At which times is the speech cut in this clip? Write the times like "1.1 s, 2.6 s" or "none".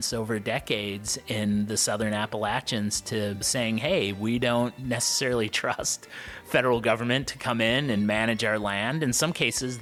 none